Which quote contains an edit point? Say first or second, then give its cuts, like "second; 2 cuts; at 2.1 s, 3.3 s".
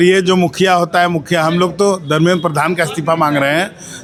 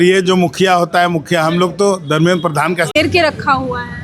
second; 1 cut; at 3.0 s